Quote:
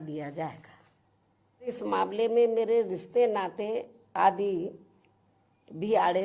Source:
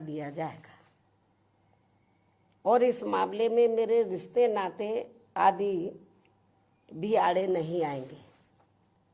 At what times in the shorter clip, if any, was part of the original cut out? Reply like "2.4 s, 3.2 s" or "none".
1.8 s